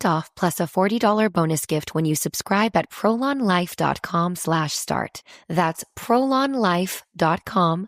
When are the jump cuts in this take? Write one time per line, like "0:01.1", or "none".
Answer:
0:05.2